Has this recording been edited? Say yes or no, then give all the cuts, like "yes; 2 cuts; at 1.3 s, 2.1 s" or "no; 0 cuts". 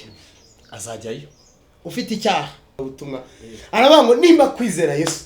yes; 1 cut; at 2.8 s